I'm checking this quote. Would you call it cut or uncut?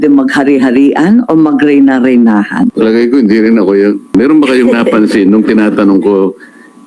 cut